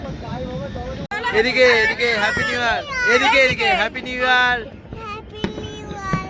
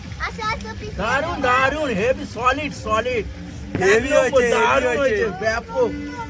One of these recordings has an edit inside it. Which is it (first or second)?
first